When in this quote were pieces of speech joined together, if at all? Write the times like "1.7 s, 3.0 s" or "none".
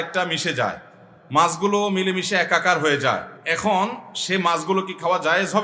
none